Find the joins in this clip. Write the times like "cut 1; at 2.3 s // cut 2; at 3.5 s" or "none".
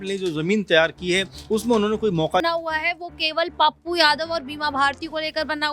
cut 1; at 2.4 s